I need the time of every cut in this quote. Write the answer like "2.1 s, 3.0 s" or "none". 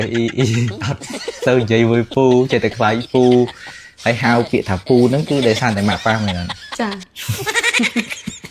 none